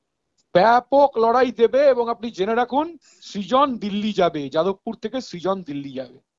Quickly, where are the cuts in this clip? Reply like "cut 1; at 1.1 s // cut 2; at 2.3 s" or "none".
none